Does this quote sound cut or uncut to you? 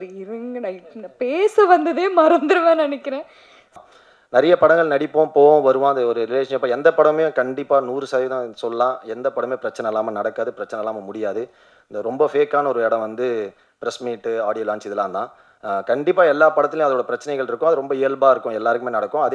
cut